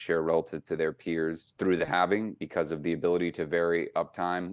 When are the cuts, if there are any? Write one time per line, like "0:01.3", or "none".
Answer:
0:01.5
0:02.4